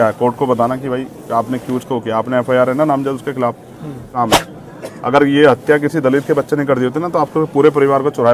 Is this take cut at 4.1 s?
yes; 1 cut; at 4.1 s

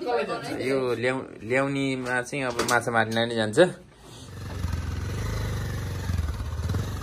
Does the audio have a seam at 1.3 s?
no; 1 cut; at 4.4 s

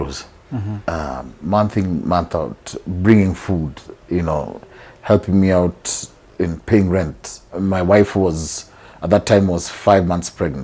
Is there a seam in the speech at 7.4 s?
yes; 1 cut; at 7.4 s

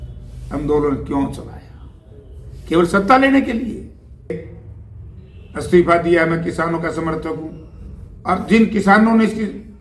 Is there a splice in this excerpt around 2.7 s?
no; 1 cut; at 4.3 s

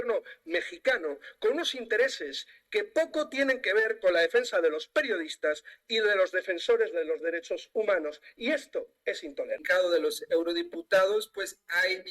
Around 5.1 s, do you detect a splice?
no; 1 cut; at 9.6 s

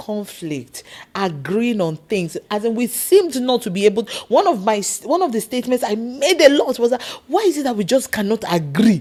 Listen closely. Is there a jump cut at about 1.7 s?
no; 0 cuts

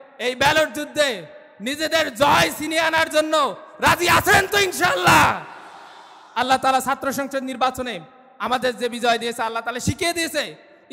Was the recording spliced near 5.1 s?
no; 0 cuts

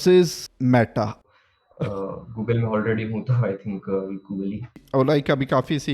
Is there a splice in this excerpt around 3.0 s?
no; 2 cuts; at 1.2 s, 4.8 s

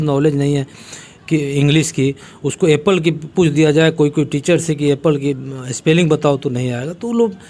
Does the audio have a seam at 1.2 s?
no; 0 cuts

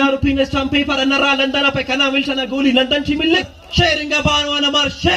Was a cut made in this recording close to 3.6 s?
yes; 1 cut; at 3.6 s

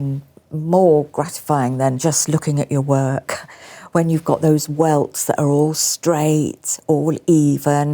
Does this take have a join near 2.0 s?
yes; 1 cut; at 2.0 s

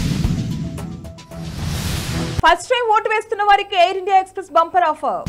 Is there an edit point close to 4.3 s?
no; 1 cut; at 2.4 s

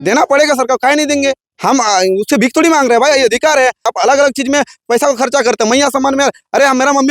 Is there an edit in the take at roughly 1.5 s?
yes; 2 cuts; at 1.5 s, 3.9 s

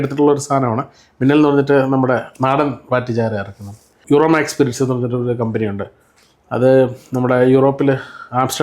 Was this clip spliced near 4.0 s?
yes; 1 cut; at 4.0 s

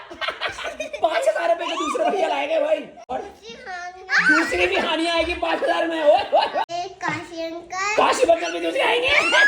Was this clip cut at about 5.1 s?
no; 2 cuts; at 3.1 s, 6.7 s

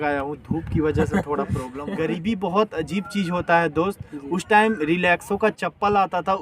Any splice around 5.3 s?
no; 1 cut; at 1.7 s

